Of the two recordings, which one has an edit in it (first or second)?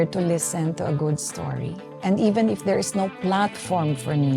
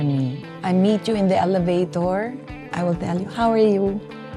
second